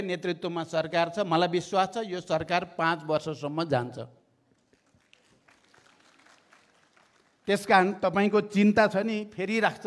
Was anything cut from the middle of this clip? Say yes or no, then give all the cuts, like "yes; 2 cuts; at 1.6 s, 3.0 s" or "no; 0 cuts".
no; 0 cuts